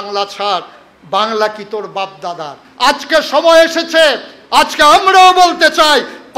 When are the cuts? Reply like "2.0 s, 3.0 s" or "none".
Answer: 2.6 s